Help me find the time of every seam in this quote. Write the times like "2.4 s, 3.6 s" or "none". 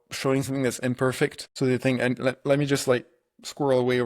1.4 s